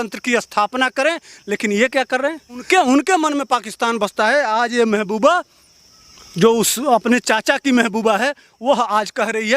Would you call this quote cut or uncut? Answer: cut